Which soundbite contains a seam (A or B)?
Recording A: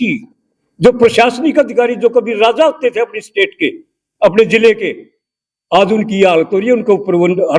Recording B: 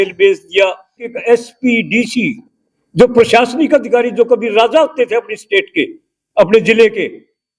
B